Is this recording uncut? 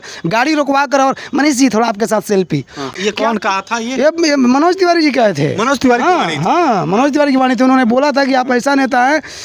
no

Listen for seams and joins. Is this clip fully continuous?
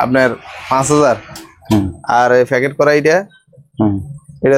yes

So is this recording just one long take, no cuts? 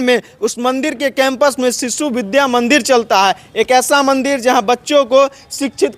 yes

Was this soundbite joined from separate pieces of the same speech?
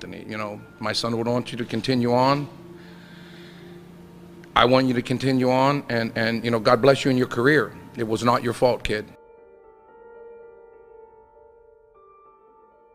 no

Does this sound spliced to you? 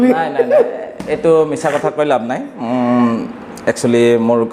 no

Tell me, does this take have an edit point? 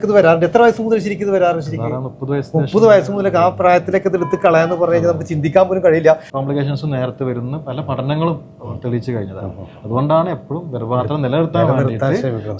yes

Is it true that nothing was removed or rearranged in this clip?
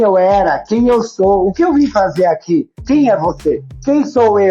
no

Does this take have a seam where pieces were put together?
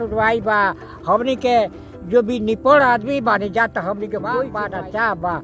yes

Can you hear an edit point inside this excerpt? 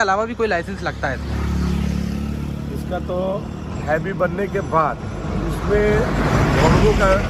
no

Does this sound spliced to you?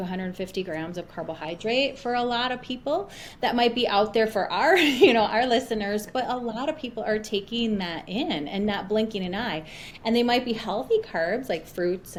no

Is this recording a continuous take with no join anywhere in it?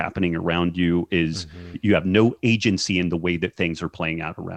no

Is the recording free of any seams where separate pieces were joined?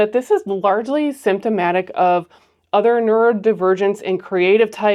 yes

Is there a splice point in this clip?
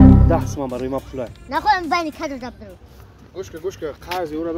no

